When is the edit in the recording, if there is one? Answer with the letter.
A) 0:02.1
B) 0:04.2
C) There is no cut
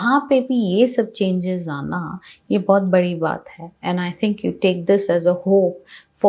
C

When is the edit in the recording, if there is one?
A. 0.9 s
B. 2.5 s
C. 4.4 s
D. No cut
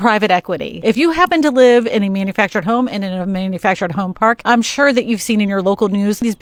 D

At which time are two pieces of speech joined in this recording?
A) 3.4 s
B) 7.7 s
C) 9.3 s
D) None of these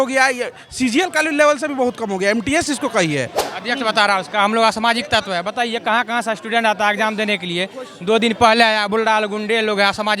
A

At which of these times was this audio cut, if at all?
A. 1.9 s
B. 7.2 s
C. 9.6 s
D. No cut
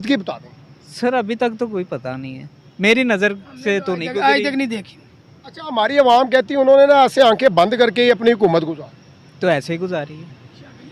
D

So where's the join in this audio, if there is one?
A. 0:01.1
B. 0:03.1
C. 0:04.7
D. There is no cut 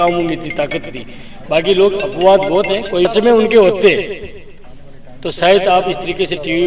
B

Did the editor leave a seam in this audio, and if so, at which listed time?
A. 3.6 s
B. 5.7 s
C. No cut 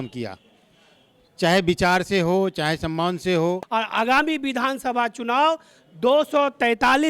A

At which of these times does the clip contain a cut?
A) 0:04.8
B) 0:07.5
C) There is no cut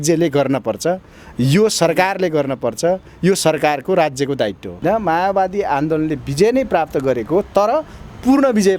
A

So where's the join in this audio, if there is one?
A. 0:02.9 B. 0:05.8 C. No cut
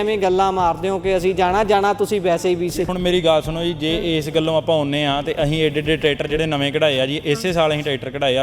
A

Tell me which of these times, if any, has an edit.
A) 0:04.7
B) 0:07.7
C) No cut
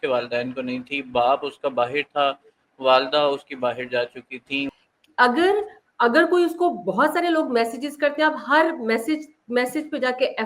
A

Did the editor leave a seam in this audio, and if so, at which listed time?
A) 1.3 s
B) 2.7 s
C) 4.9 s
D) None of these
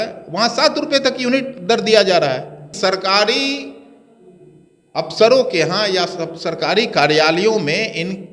B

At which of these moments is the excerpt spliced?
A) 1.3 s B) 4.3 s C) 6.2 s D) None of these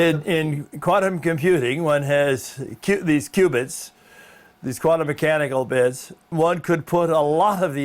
C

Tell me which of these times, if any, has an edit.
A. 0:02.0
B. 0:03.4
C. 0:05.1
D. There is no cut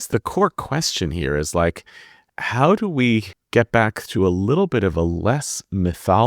B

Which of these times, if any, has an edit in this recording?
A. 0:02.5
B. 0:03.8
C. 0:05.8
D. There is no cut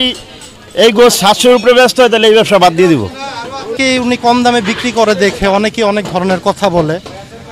B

